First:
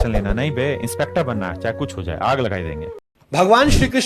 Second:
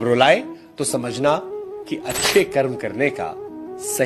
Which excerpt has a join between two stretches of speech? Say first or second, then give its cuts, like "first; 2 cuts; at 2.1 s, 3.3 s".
first; 1 cut; at 2.9 s